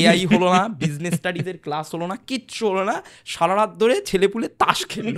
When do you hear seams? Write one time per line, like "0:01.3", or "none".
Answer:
none